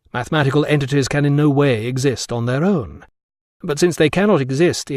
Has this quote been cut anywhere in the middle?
no; 0 cuts

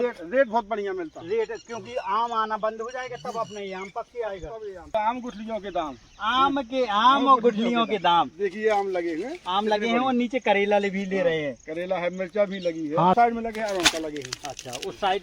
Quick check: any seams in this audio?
yes; 2 cuts; at 4.9 s, 13.2 s

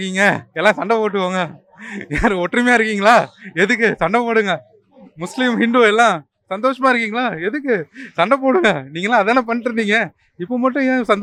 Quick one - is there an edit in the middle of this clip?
no; 0 cuts

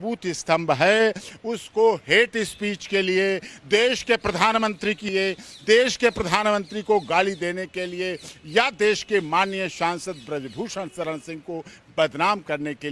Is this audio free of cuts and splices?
yes; 0 cuts

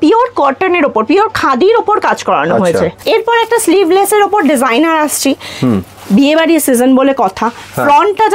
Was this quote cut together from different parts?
yes; 1 cut; at 3.0 s

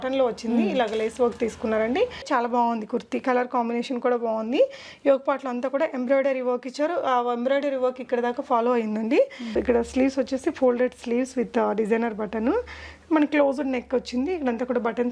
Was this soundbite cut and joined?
yes; 2 cuts; at 2.3 s, 9.6 s

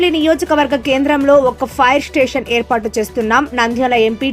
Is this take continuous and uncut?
yes; 0 cuts

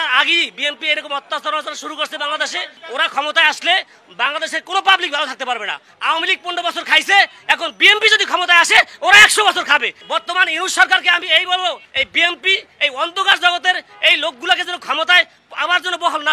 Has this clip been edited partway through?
yes; 3 cuts; at 5.9 s, 10.0 s, 11.9 s

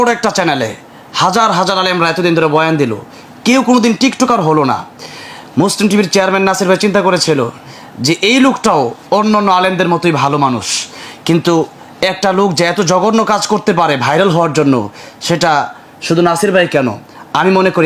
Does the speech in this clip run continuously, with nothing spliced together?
yes; 0 cuts

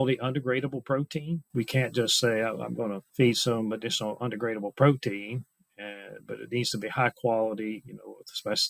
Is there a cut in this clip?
yes; 2 cuts; at 1.5 s, 3.0 s

